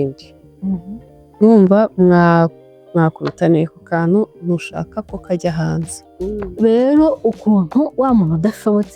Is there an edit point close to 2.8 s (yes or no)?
no